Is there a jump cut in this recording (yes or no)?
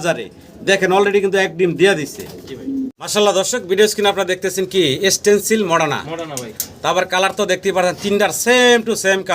yes